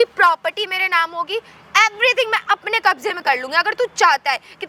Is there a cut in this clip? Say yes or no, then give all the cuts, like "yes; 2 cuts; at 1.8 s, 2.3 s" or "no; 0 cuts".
no; 0 cuts